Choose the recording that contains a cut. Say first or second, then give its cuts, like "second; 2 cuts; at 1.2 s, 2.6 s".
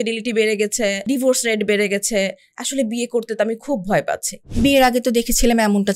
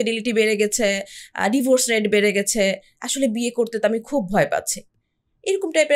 first; 2 cuts; at 1.1 s, 4.4 s